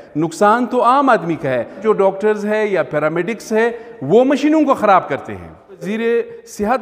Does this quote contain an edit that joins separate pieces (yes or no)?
yes